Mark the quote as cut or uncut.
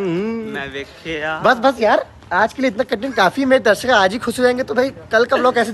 uncut